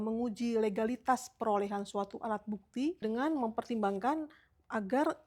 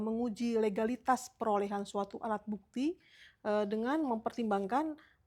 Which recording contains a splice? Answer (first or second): first